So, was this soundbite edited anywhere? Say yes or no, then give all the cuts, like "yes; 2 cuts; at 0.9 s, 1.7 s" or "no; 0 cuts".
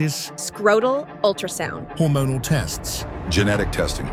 no; 0 cuts